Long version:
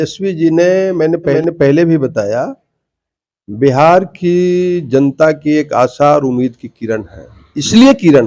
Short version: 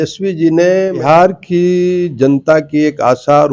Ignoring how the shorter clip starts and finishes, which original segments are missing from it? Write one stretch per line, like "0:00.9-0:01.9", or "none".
0:01.0-0:03.7